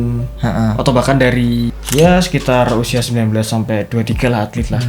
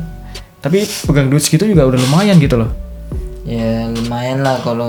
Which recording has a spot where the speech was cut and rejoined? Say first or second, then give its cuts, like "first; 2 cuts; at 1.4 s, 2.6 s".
first; 1 cut; at 1.7 s